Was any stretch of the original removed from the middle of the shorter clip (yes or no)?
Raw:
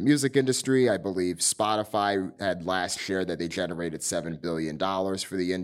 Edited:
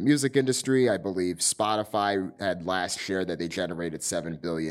no